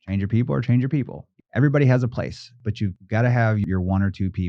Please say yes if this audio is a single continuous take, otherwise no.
no